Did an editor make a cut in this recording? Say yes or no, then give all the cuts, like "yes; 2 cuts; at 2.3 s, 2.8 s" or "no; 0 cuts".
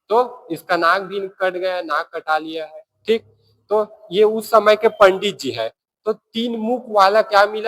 no; 0 cuts